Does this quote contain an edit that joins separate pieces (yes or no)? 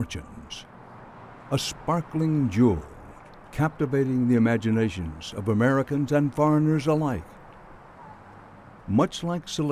yes